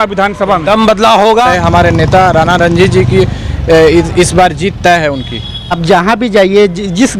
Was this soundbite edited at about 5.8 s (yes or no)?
yes